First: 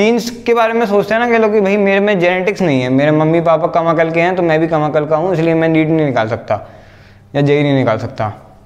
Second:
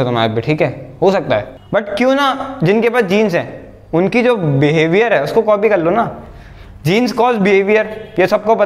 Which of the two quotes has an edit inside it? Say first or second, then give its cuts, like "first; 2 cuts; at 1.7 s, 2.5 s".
second; 1 cut; at 1.6 s